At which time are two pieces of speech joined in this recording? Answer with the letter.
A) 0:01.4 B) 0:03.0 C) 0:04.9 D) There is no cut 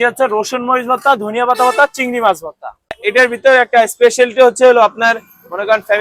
B